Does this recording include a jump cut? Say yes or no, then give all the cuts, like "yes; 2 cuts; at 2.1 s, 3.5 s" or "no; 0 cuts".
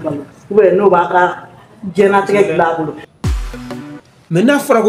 yes; 1 cut; at 4.0 s